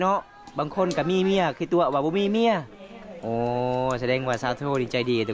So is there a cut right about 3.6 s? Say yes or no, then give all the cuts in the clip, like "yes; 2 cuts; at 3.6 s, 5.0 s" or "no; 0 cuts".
no; 0 cuts